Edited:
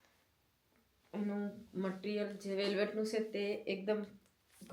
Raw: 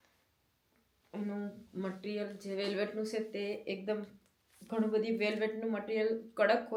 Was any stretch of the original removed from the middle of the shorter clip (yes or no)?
no